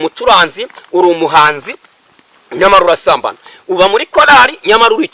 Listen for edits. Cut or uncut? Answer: uncut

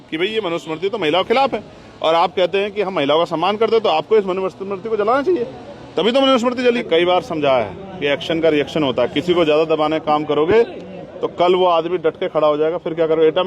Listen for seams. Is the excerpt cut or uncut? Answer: cut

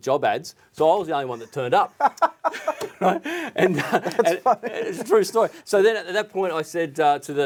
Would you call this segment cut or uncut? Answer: uncut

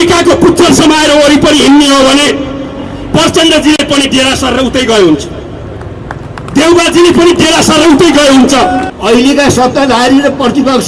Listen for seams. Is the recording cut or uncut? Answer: cut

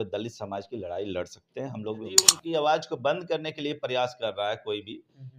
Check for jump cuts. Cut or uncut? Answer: cut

